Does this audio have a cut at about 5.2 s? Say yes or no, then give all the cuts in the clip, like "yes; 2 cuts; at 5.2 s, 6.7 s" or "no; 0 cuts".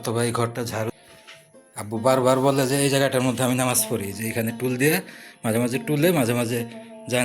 no; 1 cut; at 0.9 s